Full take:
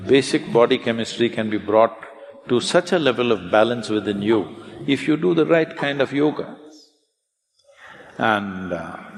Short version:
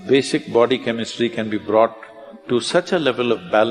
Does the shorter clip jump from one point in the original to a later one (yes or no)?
no